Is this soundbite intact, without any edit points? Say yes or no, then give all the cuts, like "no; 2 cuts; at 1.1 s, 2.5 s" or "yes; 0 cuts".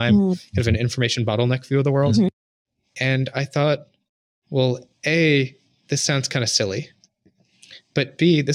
yes; 0 cuts